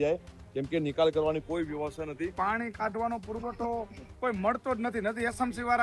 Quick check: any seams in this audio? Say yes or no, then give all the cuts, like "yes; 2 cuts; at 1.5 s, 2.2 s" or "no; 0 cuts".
yes; 1 cut; at 2.3 s